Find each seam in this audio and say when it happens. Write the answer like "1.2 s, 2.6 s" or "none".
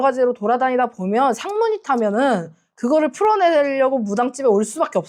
none